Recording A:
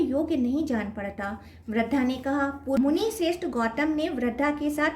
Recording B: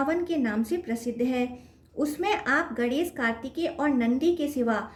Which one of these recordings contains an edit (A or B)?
A